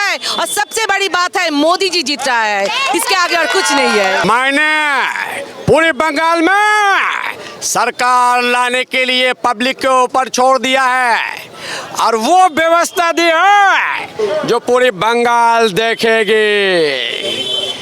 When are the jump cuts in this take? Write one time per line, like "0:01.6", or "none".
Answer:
0:04.2